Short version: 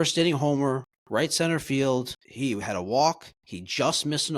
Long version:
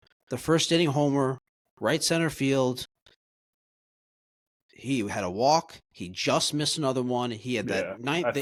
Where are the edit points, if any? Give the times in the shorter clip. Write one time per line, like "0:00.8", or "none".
0:00.9
0:02.2